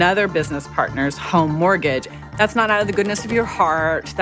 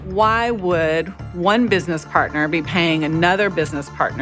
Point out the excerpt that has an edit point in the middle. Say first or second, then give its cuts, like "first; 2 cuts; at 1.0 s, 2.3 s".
first; 1 cut; at 2.2 s